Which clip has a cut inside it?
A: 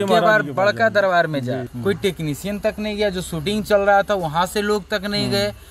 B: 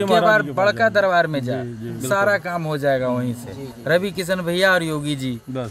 A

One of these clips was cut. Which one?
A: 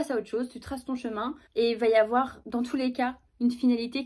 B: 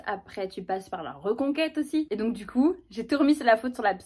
B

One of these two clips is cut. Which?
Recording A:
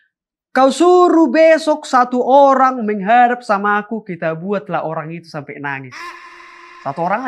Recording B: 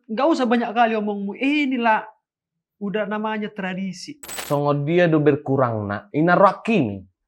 B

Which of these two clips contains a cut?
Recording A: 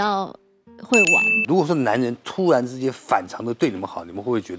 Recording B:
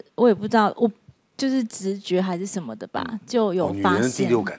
A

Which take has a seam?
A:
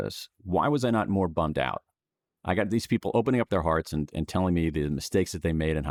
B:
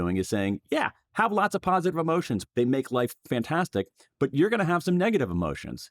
B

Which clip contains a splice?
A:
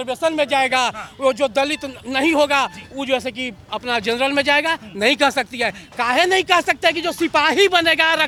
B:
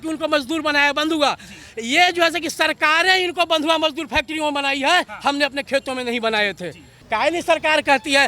B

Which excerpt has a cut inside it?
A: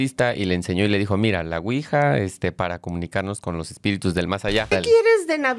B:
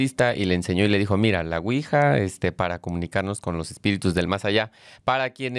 A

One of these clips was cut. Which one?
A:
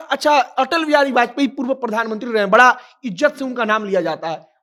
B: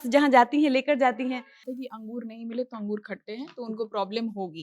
B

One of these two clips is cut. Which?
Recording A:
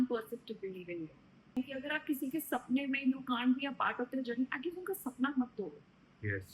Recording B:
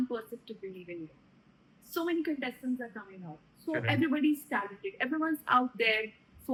A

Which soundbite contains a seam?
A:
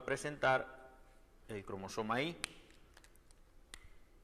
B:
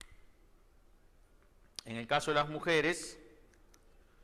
A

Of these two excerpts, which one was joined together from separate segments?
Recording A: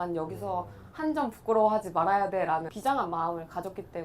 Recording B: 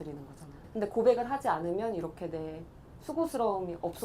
A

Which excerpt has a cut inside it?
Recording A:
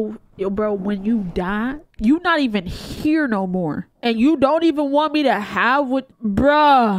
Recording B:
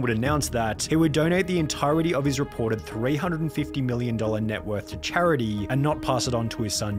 A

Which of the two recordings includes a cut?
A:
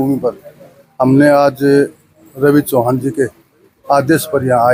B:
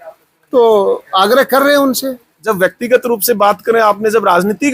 B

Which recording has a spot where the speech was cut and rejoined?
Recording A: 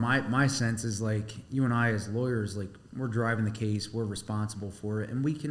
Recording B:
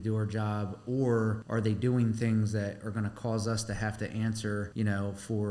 B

